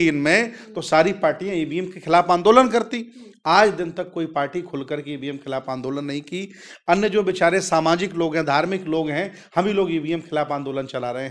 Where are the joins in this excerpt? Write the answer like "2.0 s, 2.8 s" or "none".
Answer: none